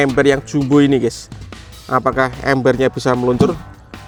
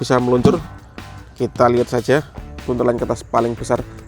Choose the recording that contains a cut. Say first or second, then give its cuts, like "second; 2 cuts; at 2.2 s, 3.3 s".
second; 1 cut; at 2.6 s